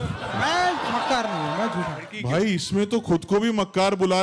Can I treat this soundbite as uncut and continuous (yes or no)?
no